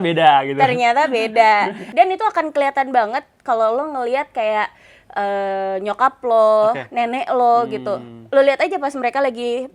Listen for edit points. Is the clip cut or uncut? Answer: cut